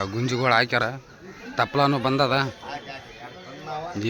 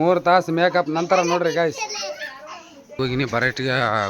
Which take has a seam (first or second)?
second